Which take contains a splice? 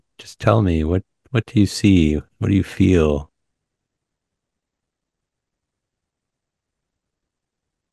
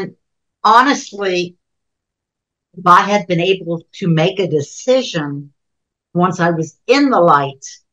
first; 1 cut; at 4.4 s

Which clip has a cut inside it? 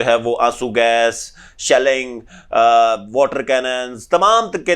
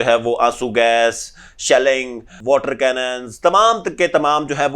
second; 1 cut; at 2.4 s

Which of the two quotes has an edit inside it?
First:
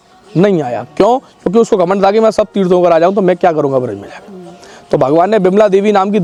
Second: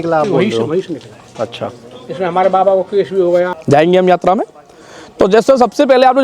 second; 1 cut; at 3.6 s

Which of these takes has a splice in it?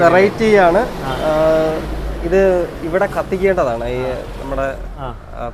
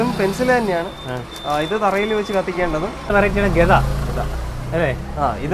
second; 1 cut; at 3.1 s

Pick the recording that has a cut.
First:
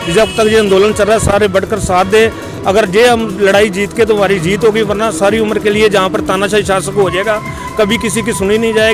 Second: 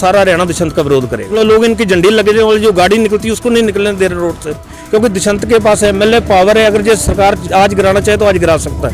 second; 2 cuts; at 1.3 s, 4.7 s

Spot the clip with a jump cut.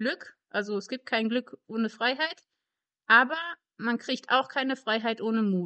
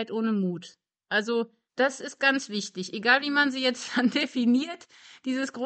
second; 1 cut; at 1.6 s

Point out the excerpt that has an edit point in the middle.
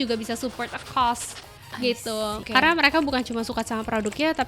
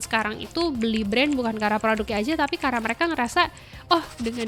first; 1 cut; at 2.4 s

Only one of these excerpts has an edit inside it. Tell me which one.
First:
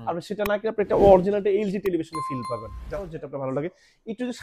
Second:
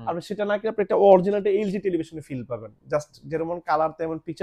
first; 1 cut; at 2.9 s

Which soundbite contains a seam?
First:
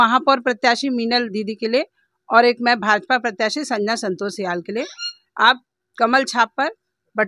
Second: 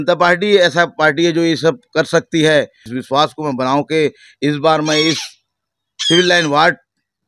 second; 1 cut; at 2.9 s

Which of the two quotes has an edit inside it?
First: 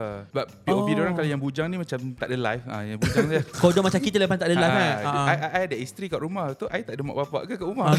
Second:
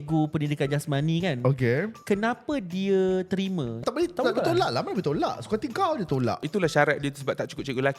second; 3 cuts; at 1.9 s, 3.8 s, 6.4 s

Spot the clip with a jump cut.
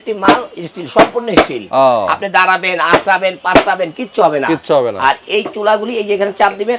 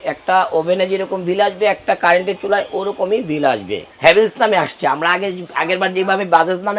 second; 1 cut; at 3.9 s

